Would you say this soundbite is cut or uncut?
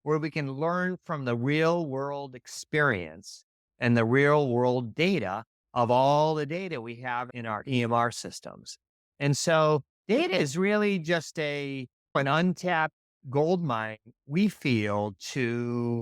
uncut